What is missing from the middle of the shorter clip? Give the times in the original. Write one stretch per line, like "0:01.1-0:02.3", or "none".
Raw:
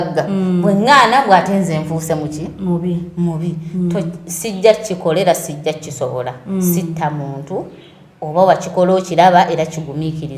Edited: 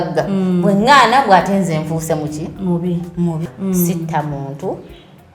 0:03.5-0:06.4

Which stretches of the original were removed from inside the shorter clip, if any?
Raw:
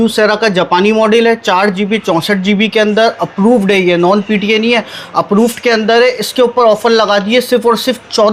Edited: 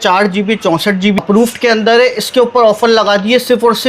0:02.7-0:05.3

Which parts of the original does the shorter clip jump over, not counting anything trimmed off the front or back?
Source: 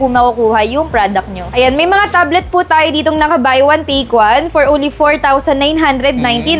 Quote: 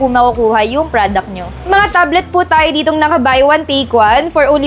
0:01.6-0:01.8

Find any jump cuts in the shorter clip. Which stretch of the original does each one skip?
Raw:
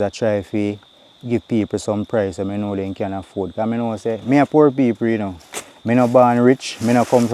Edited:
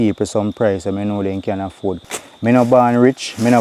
0:03.5-0:05.4

